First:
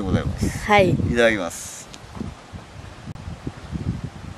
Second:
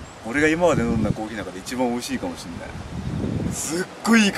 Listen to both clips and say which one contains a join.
first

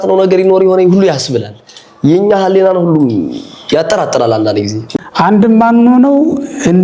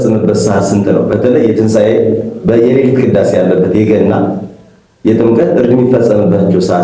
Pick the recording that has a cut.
first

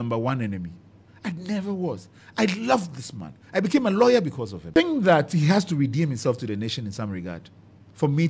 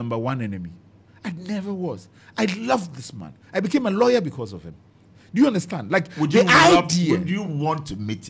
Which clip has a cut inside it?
first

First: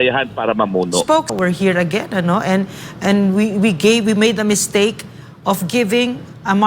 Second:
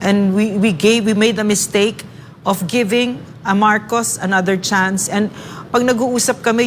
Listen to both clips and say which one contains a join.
first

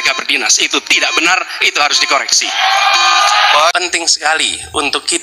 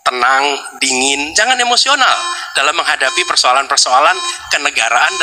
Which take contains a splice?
first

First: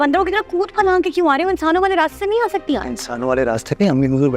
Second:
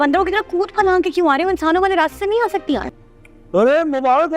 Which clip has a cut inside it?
second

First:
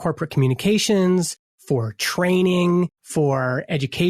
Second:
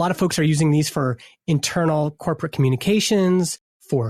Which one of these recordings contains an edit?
first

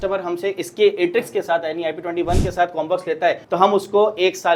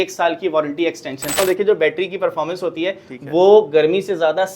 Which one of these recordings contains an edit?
second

